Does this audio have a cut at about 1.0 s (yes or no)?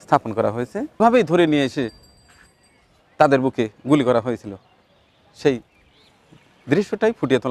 yes